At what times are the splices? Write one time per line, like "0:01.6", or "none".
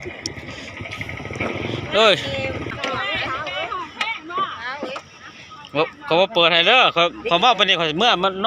0:02.7